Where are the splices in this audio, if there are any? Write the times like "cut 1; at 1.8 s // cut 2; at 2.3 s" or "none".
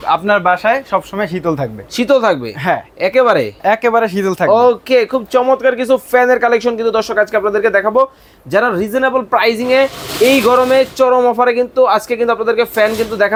none